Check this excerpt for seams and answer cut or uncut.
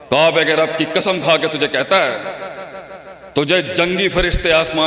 uncut